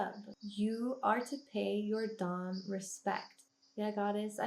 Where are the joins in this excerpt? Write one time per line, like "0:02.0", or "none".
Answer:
0:03.4